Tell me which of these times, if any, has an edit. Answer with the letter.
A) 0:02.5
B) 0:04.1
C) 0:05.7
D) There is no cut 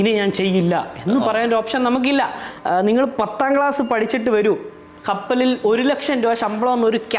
A